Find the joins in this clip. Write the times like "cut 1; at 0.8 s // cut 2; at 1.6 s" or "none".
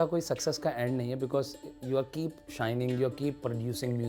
none